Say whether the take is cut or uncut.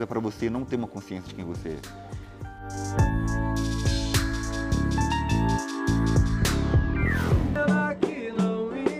uncut